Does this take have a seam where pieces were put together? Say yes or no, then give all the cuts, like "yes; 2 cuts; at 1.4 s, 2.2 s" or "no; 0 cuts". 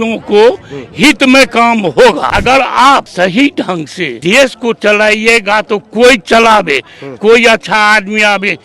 yes; 3 cuts; at 2.3 s, 3.1 s, 4.1 s